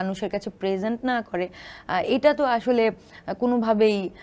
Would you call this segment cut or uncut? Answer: uncut